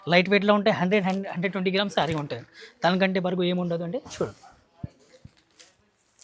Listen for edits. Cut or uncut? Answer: uncut